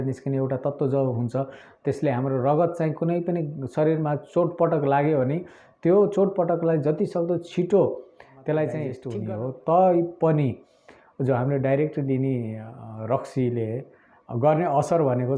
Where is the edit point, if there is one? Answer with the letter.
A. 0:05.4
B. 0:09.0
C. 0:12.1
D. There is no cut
B